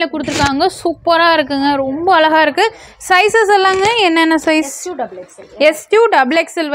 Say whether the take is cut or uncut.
cut